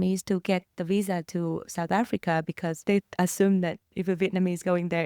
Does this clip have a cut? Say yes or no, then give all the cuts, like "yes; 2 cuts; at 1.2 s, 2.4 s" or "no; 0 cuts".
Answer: yes; 1 cut; at 2.8 s